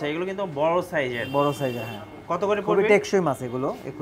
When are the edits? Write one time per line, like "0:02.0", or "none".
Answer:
none